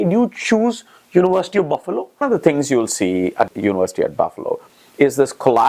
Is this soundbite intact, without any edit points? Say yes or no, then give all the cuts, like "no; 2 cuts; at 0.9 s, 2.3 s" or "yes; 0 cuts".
no; 2 cuts; at 2.2 s, 3.5 s